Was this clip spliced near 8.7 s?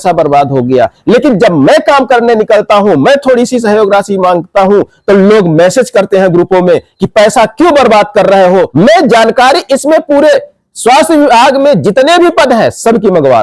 yes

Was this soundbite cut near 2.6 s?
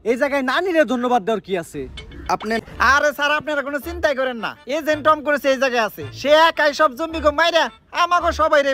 yes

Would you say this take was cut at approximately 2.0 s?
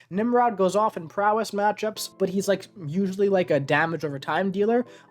yes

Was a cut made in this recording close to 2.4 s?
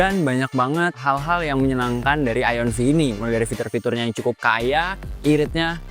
no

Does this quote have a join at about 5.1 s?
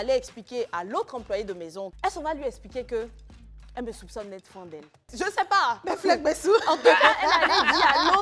yes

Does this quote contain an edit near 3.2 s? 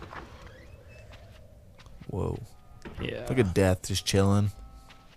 yes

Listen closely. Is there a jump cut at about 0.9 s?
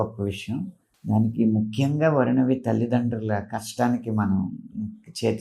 yes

